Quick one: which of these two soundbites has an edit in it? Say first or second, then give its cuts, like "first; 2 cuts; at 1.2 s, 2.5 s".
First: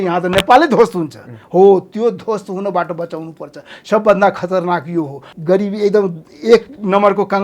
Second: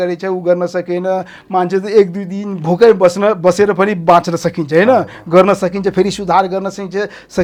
first; 1 cut; at 5.3 s